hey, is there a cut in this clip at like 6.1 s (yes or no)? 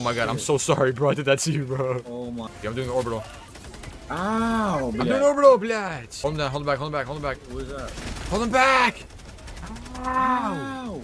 yes